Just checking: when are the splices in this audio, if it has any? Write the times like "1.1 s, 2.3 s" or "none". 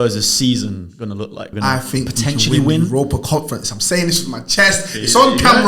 1.5 s